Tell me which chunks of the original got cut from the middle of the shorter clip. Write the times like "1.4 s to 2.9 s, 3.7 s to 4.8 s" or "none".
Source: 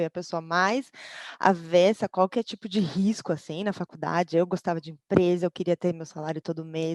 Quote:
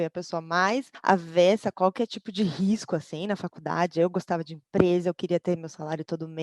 0.9 s to 1.3 s